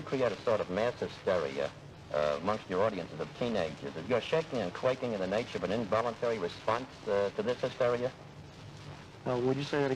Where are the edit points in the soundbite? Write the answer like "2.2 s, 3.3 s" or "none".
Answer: none